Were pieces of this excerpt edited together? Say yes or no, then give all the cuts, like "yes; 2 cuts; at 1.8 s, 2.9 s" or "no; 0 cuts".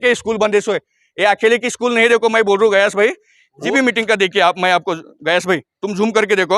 yes; 1 cut; at 3.5 s